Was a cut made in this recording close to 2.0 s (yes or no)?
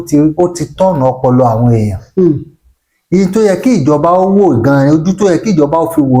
no